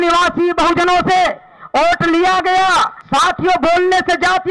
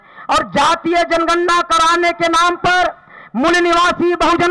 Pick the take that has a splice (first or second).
first